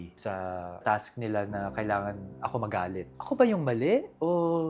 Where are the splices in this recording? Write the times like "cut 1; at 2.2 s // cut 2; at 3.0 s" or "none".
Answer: cut 1; at 3.1 s